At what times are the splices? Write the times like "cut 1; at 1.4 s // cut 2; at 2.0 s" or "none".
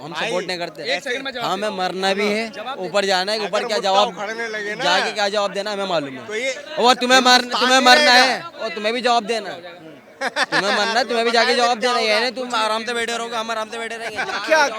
none

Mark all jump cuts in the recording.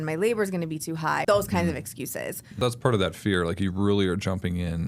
cut 1; at 1.2 s // cut 2; at 2.5 s

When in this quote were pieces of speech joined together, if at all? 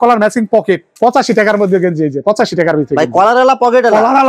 cut 1; at 0.9 s

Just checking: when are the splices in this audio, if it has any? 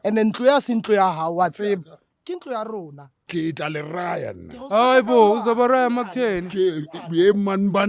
cut 1; at 3.2 s

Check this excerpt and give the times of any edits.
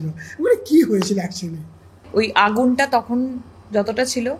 cut 1; at 2.0 s

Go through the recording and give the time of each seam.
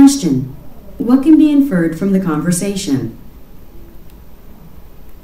none

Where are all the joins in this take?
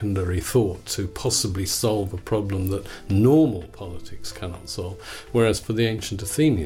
none

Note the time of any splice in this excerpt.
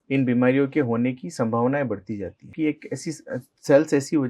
cut 1; at 2.5 s

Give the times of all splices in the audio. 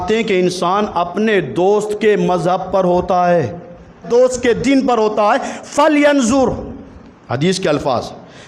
cut 1; at 4.1 s

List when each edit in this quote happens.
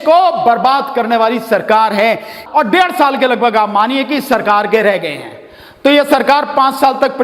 cut 1; at 2.3 s

